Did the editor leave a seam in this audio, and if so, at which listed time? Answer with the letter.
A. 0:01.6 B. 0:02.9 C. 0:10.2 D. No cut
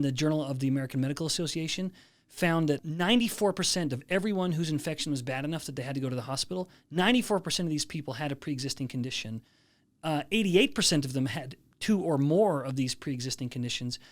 B